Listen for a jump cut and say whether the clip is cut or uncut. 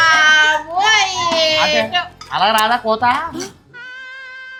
uncut